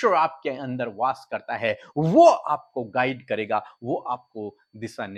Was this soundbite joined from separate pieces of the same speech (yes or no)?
no